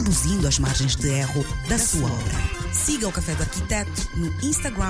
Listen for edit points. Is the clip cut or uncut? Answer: uncut